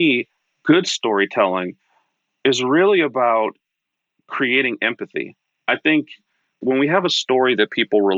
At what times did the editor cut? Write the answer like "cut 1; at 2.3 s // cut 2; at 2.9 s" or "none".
cut 1; at 6.5 s